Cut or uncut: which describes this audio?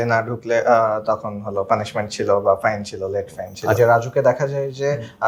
cut